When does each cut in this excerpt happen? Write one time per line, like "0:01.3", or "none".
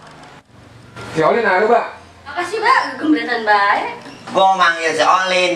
0:02.4